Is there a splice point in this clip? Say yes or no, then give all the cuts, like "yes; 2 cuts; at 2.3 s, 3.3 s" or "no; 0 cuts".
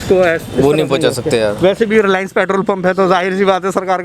no; 0 cuts